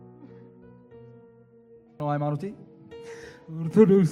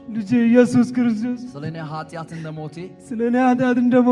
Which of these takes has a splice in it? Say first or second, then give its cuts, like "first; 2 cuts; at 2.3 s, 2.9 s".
first; 1 cut; at 2.0 s